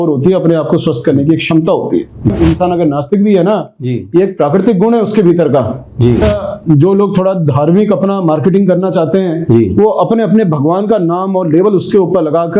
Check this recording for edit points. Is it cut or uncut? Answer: cut